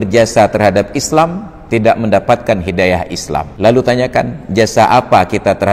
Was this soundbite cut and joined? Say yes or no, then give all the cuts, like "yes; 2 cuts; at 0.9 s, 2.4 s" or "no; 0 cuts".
yes; 1 cut; at 3.5 s